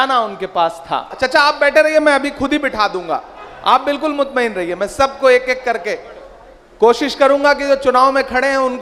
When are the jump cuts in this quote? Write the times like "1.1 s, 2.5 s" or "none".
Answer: 1.1 s